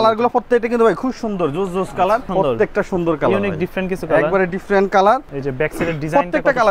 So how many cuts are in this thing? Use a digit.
2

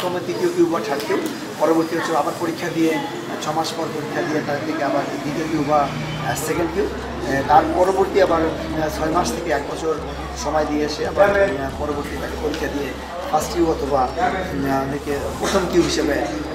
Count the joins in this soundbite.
0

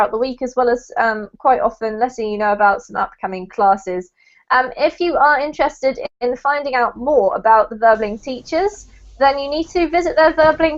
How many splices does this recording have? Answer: 0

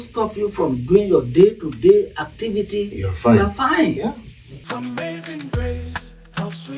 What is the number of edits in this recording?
1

